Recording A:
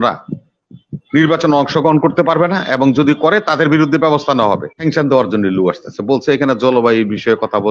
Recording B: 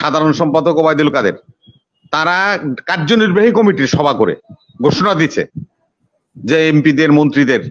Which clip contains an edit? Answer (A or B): A